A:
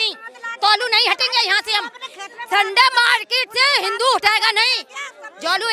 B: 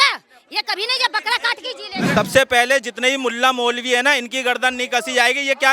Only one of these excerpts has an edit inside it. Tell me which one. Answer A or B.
B